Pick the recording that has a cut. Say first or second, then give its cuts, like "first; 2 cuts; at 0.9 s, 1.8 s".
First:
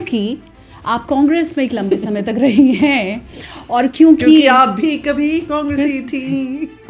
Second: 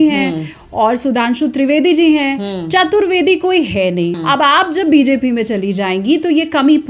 second; 1 cut; at 4.2 s